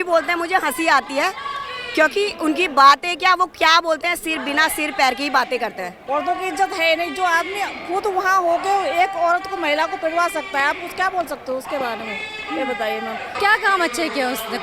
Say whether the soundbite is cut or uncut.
cut